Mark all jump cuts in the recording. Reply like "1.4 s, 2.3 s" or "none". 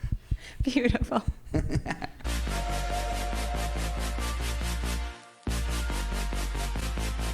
2.3 s